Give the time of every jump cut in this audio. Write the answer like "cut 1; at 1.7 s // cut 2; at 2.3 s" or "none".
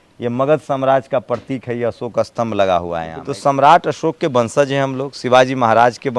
cut 1; at 3.1 s